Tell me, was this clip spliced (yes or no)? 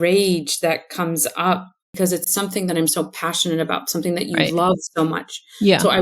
yes